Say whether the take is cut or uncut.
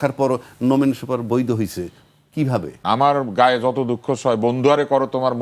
cut